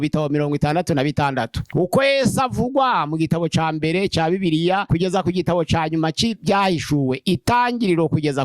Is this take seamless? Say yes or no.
no